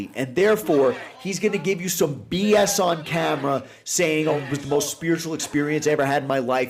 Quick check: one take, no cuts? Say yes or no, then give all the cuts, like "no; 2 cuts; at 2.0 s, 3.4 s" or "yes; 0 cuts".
no; 1 cut; at 4.4 s